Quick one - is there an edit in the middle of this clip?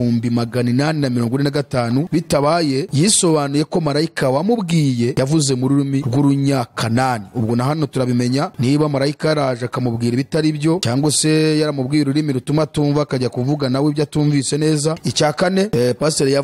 no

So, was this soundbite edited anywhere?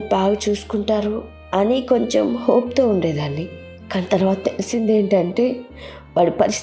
no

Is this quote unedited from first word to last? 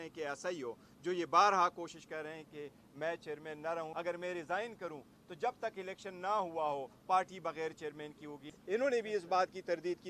no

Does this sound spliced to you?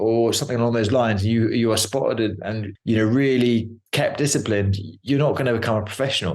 no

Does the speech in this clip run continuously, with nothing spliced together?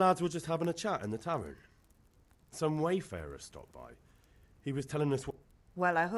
no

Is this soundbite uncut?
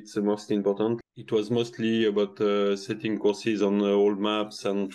no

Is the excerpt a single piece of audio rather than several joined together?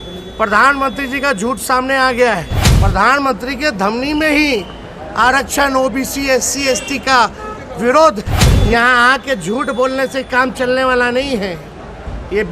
no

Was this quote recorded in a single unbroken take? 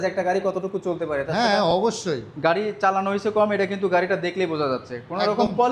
yes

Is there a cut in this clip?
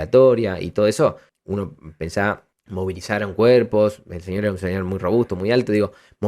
yes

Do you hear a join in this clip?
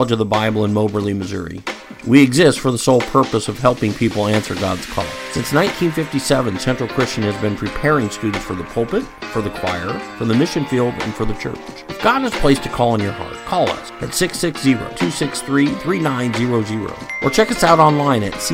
no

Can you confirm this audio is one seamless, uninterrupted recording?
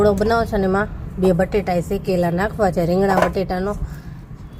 yes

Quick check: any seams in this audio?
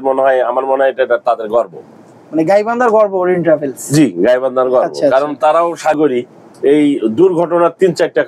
yes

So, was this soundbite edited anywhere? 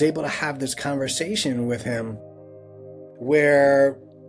no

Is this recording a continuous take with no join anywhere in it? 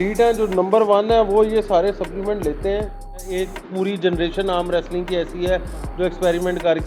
no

